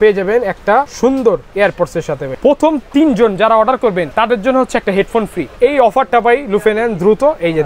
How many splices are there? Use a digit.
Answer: 4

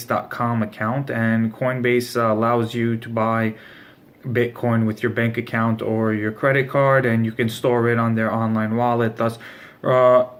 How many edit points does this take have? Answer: 0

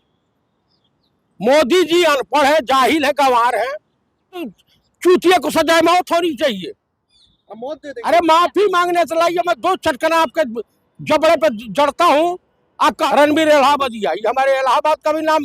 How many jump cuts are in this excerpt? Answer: 3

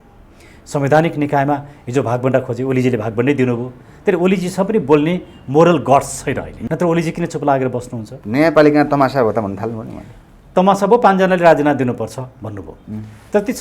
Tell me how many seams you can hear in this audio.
1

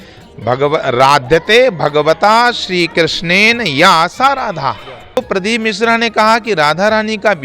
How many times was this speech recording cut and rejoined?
1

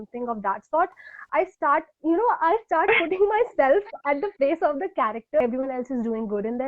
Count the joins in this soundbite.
1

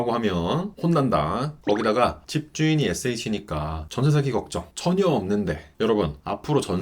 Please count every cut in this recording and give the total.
1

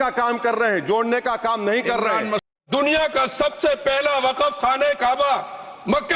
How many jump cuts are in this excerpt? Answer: 1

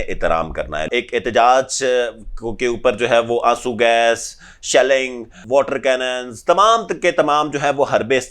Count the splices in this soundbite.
2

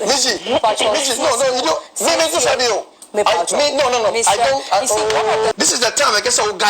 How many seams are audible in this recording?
1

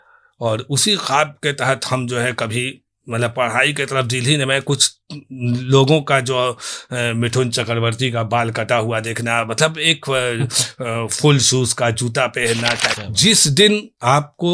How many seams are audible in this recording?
1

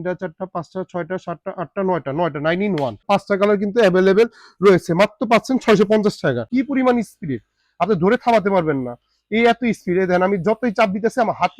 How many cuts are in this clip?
2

